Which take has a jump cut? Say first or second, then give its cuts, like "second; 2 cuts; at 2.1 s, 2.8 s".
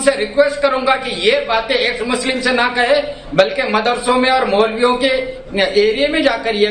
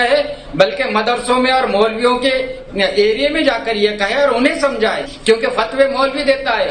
second; 1 cut; at 5.1 s